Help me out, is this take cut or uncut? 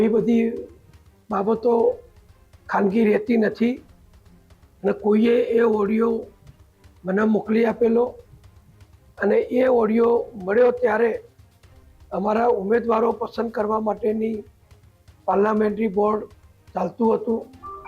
uncut